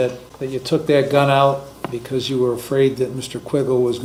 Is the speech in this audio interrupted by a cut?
no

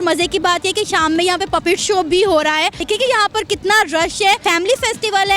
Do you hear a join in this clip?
yes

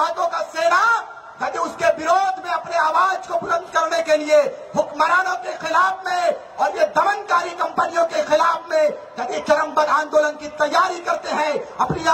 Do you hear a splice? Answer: no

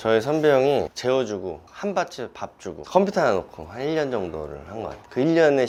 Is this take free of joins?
yes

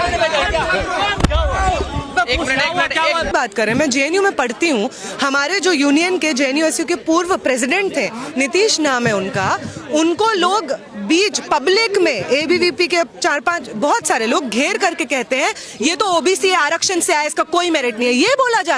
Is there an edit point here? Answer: yes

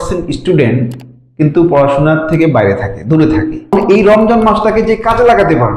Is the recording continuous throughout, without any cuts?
no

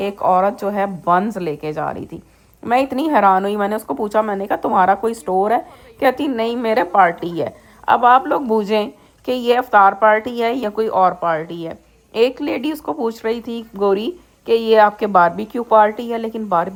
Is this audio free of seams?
yes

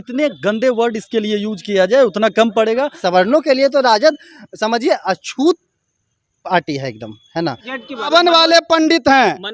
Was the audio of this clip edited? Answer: yes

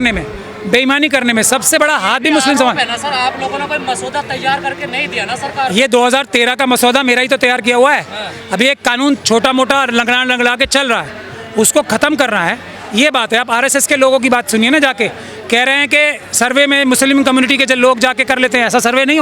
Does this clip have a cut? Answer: no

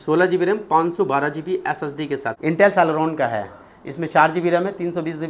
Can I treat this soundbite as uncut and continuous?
no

